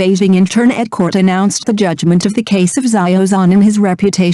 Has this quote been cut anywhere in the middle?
yes; 1 cut; at 2.8 s

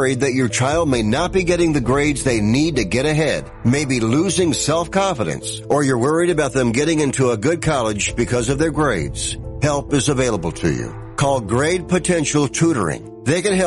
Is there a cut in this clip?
no; 0 cuts

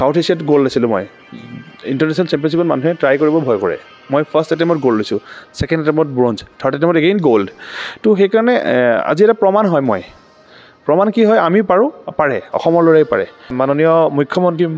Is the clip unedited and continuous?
no; 1 cut; at 13.5 s

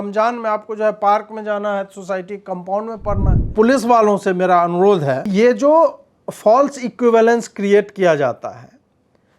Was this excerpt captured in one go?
no; 2 cuts; at 3.5 s, 5.3 s

